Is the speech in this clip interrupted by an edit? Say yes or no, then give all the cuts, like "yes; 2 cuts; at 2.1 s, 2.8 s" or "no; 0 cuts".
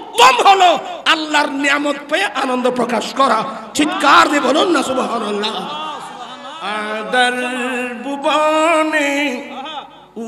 yes; 1 cut; at 6.5 s